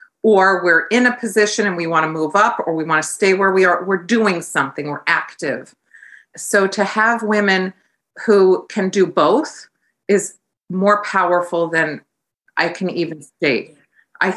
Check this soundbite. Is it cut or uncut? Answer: cut